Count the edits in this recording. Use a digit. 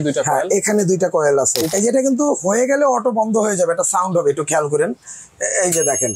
1